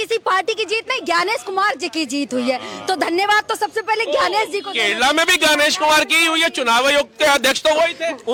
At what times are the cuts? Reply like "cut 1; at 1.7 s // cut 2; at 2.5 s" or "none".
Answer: none